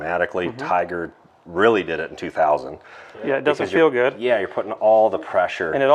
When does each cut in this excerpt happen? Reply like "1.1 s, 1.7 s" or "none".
3.1 s